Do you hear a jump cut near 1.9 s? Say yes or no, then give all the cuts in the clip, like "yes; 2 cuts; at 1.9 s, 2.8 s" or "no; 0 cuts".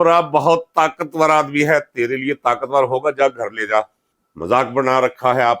no; 1 cut; at 4.1 s